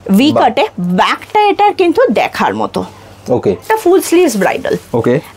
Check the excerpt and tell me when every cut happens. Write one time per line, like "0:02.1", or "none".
0:03.6